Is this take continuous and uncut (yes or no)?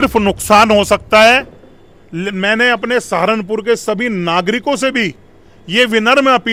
yes